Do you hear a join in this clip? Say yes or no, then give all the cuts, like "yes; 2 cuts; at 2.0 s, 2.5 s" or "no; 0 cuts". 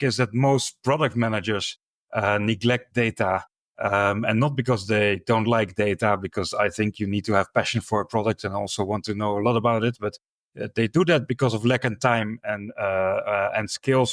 no; 0 cuts